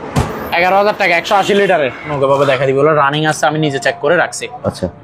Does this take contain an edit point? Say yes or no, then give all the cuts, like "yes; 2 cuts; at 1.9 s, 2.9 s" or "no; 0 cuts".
yes; 1 cut; at 2.1 s